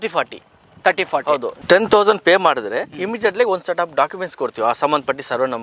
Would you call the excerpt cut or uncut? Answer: cut